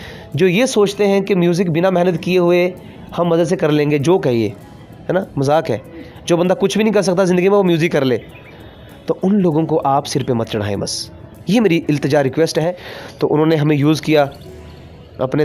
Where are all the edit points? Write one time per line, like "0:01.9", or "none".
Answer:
0:12.6